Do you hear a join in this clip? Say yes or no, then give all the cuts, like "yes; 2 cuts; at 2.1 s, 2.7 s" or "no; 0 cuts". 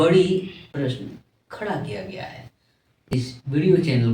yes; 1 cut; at 3.1 s